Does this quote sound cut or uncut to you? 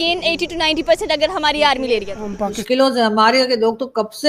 cut